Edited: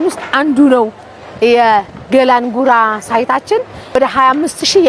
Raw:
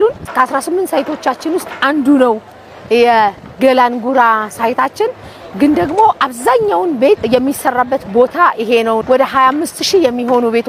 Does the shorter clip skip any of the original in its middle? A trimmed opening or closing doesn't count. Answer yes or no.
yes